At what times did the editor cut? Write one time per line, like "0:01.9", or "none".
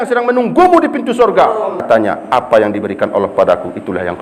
0:01.8